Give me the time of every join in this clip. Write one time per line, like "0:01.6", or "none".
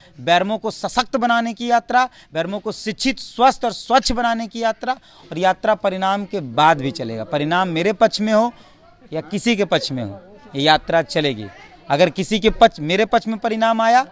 none